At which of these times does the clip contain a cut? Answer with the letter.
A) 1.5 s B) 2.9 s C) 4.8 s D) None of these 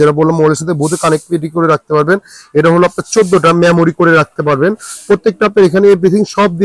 D